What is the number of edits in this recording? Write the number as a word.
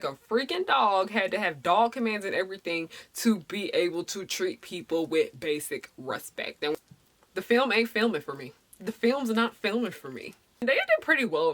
two